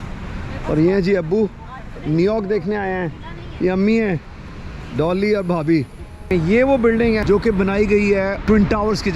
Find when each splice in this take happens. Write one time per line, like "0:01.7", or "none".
0:06.3
0:07.2
0:08.4